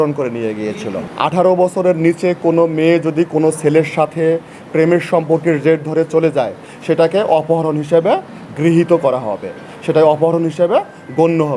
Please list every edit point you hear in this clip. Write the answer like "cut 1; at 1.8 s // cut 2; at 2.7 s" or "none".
none